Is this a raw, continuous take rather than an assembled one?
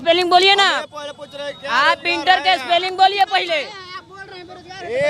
yes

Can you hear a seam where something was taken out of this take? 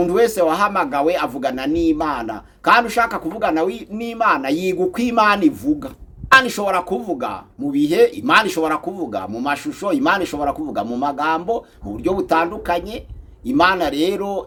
no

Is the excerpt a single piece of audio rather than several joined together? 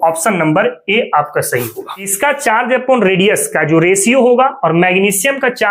no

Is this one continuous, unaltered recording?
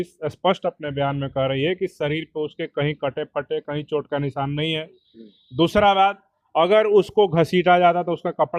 yes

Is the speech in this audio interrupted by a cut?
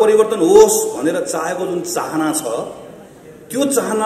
no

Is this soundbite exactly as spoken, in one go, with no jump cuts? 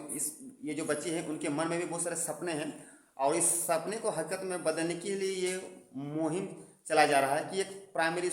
yes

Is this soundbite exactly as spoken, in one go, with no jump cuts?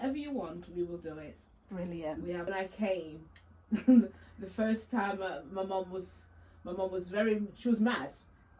no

